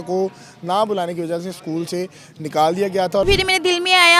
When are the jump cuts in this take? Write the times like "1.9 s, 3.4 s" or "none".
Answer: 3.3 s